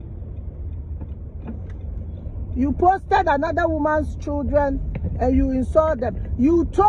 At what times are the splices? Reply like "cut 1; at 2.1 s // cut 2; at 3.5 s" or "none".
none